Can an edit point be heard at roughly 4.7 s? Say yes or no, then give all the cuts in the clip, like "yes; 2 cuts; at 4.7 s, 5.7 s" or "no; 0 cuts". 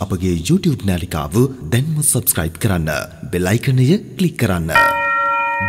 yes; 1 cut; at 4.7 s